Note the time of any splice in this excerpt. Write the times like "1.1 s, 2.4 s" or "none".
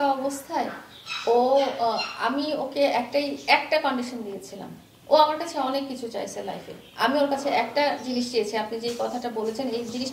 none